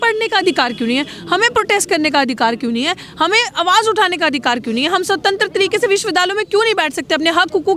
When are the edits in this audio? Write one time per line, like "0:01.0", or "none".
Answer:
none